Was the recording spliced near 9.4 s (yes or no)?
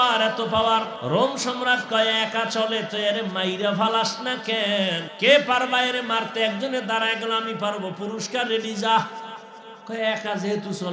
no